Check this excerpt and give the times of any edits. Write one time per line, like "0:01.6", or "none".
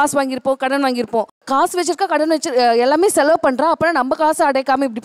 0:01.4